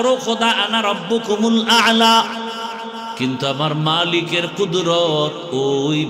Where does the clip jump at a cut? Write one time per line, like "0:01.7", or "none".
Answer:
0:03.1

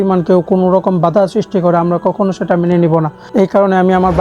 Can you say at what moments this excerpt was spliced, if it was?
0:03.2

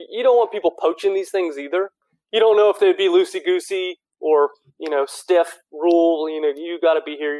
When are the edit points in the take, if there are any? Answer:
0:02.1

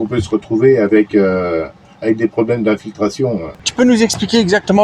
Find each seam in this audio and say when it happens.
0:03.7

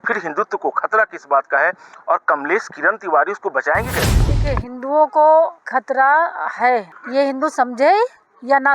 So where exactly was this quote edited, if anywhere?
0:04.2
0:05.6
0:07.0

